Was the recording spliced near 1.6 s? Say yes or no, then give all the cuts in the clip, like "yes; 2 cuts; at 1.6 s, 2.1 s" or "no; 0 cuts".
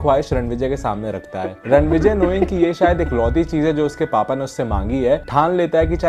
yes; 1 cut; at 1.6 s